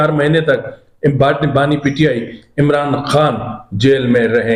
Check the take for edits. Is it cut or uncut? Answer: uncut